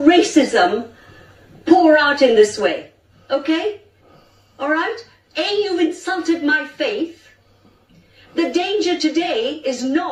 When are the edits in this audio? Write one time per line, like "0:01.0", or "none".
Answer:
none

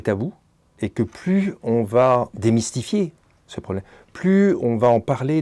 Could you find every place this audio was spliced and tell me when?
0:02.3

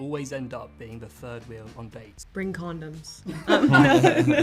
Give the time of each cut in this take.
0:02.2

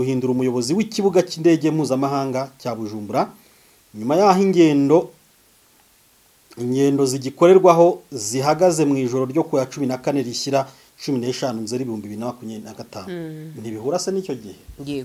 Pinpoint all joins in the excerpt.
none

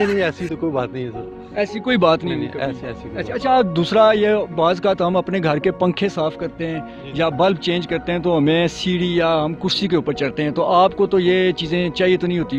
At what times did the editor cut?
none

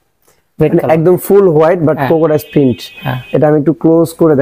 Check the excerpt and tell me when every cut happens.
none

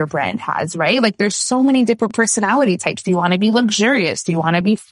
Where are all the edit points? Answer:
none

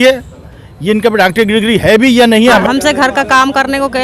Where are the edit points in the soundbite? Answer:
0:02.6

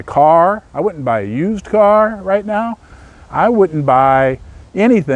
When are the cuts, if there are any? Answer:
none

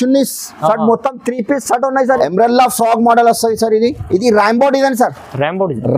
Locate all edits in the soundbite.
0:02.2

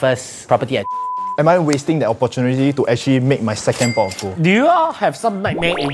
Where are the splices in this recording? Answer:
0:01.3
0:04.2

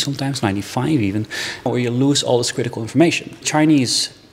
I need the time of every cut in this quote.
0:01.7
0:03.3

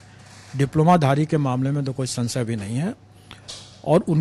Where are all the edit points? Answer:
none

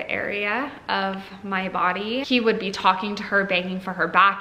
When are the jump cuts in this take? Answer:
0:02.2

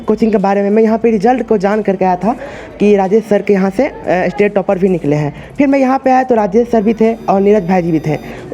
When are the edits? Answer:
none

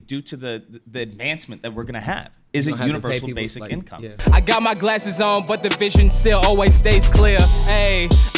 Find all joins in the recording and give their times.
0:04.1

